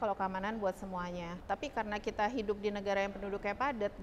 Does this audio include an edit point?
yes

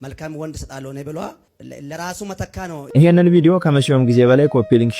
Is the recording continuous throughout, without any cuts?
no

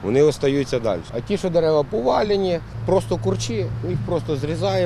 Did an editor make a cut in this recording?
yes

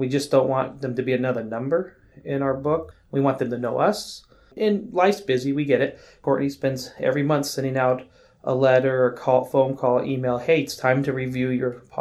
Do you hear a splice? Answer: yes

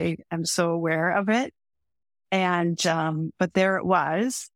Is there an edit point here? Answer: no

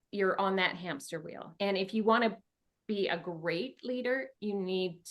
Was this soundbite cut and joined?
yes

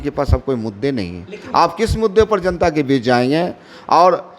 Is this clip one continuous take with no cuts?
yes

